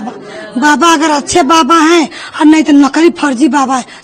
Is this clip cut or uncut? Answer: uncut